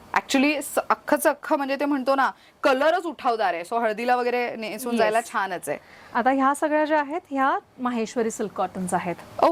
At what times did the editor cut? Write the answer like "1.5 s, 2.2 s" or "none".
none